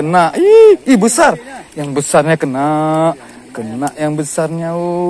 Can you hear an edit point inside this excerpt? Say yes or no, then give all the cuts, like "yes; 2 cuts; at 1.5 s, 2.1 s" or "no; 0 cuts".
no; 0 cuts